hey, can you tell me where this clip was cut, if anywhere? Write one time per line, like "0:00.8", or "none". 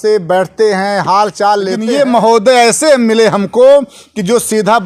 0:01.8